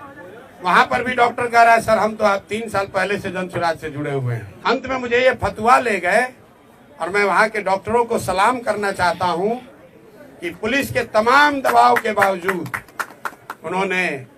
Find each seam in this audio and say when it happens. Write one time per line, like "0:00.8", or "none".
0:04.4